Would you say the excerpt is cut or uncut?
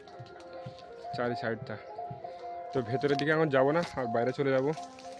cut